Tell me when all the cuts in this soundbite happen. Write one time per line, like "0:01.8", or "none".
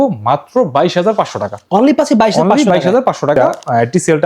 0:03.4